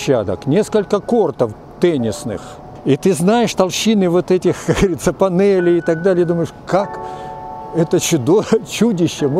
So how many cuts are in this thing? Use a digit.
1